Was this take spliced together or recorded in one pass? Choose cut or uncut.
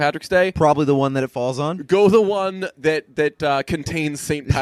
uncut